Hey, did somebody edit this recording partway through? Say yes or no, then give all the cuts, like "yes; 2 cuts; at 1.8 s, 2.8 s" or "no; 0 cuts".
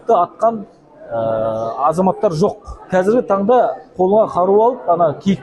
yes; 1 cut; at 2.7 s